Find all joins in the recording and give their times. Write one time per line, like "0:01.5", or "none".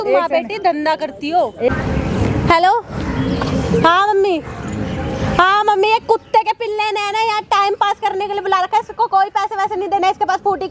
0:01.7